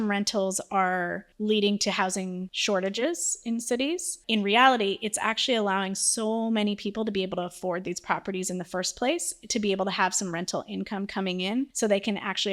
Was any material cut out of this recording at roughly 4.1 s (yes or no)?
yes